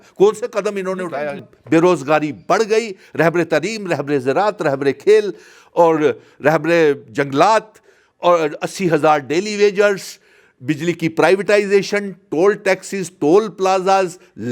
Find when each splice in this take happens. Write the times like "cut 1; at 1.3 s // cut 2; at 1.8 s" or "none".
cut 1; at 1.4 s